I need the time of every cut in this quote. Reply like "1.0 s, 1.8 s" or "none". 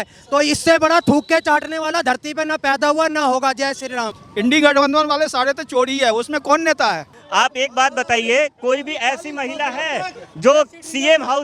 none

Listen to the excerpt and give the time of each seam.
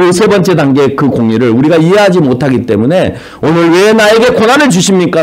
none

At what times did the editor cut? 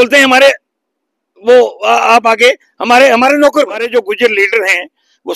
3.9 s

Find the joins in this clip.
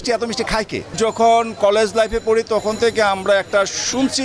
0.9 s

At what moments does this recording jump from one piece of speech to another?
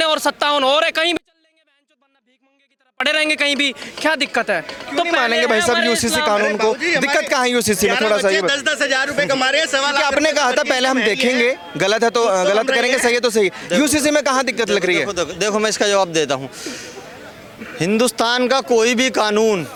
none

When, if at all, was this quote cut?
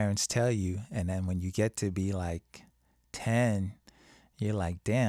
none

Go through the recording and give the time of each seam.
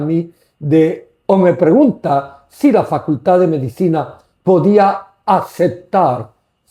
none

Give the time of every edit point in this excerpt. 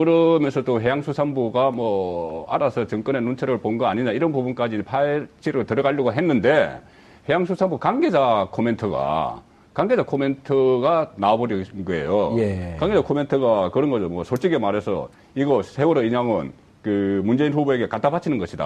none

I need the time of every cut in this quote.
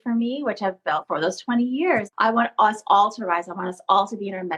1.0 s, 2.1 s

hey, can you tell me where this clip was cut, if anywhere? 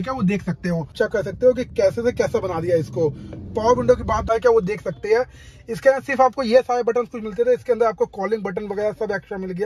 0.9 s, 4.2 s

